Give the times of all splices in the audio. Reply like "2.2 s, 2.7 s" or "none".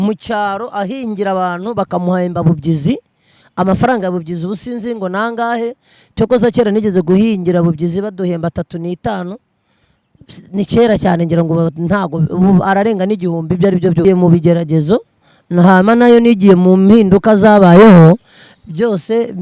14.0 s